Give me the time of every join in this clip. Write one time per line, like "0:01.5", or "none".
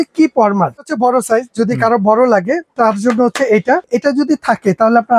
0:00.8
0:03.9